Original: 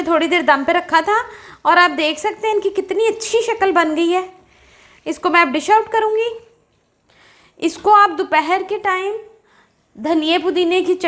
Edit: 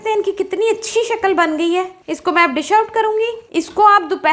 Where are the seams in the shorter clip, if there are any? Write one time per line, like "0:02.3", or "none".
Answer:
0:02.0
0:03.4